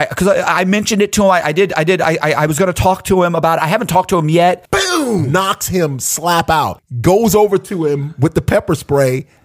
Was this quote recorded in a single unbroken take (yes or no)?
no